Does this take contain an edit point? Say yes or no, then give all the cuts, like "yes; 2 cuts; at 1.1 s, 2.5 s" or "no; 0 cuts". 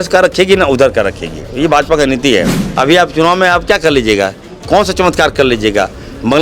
yes; 1 cut; at 2.6 s